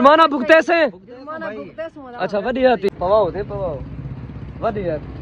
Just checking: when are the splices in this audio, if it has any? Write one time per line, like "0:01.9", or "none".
0:02.9